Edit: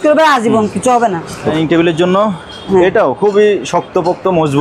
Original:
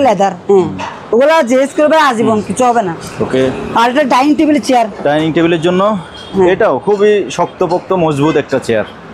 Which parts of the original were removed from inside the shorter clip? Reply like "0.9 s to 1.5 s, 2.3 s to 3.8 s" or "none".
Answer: 3.3 s to 5.2 s